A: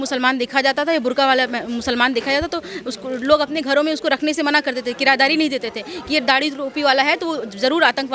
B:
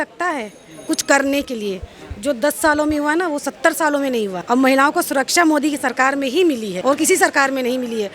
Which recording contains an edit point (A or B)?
B